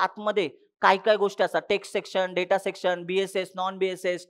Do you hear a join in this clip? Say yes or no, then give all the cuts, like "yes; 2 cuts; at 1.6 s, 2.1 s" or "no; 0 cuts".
no; 0 cuts